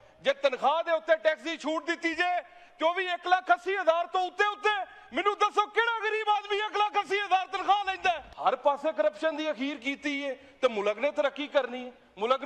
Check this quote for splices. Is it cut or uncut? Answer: cut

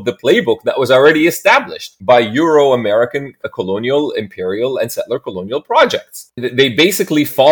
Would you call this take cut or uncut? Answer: uncut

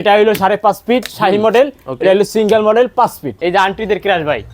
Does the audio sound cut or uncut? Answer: cut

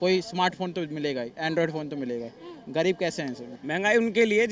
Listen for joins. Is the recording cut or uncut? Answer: cut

